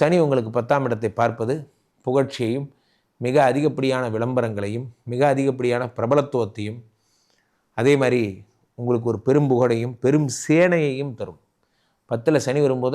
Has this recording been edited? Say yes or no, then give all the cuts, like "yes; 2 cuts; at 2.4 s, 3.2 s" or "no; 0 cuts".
no; 0 cuts